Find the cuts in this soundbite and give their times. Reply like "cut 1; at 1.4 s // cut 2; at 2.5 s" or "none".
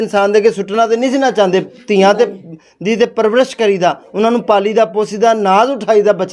none